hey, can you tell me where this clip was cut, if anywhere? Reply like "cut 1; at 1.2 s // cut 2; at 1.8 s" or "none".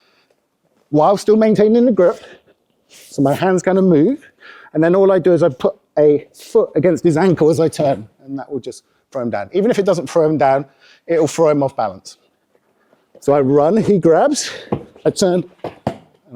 none